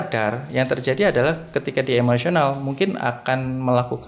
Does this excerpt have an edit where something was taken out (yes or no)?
no